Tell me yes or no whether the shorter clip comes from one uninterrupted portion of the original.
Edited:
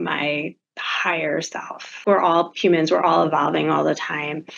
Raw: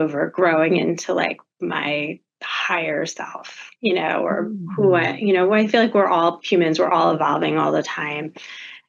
no